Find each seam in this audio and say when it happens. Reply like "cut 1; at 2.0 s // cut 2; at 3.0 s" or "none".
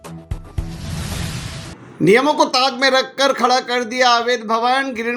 cut 1; at 1.7 s

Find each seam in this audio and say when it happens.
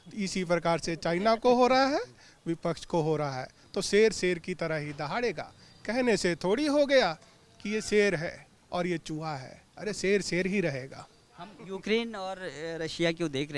none

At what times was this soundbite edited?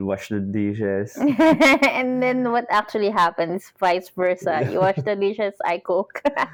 none

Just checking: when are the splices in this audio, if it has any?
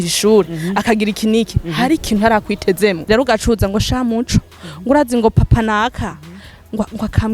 cut 1; at 3.0 s

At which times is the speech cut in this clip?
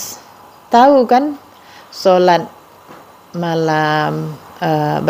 none

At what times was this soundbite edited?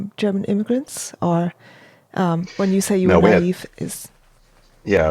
none

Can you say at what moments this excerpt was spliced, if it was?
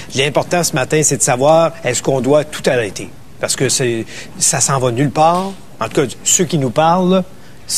cut 1; at 6.7 s

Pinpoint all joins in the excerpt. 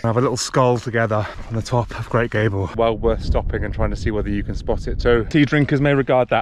cut 1; at 1.4 s // cut 2; at 2.7 s // cut 3; at 5.3 s

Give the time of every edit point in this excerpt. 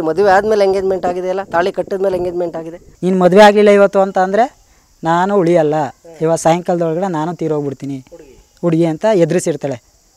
cut 1; at 2.8 s

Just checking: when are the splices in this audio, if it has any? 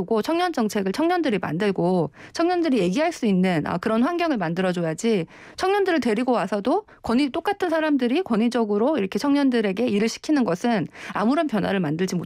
none

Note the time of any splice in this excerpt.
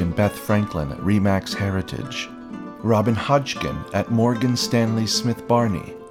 none

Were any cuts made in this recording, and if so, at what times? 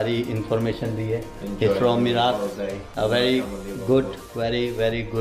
none

